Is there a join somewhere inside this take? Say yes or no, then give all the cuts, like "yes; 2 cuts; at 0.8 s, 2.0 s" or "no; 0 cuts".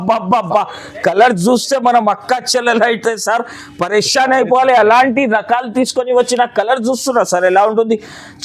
no; 0 cuts